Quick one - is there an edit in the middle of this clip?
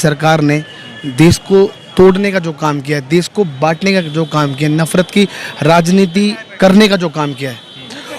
no; 0 cuts

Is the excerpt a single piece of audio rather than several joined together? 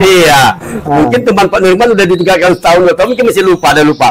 yes; 0 cuts

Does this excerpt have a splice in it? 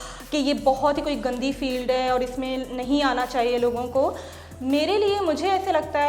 no; 0 cuts

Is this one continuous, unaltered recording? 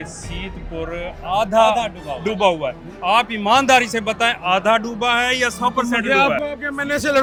yes; 0 cuts

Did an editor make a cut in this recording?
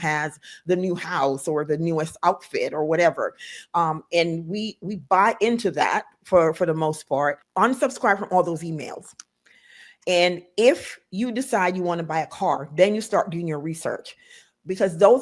yes; 1 cut; at 7.4 s

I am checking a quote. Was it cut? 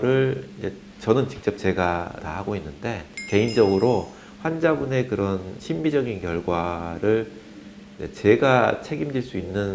no; 0 cuts

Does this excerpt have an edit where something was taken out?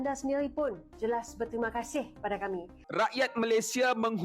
yes; 1 cut; at 2.8 s

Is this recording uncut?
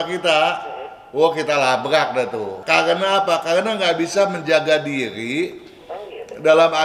no; 1 cut; at 2.5 s

